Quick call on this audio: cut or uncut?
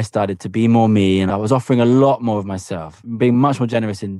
cut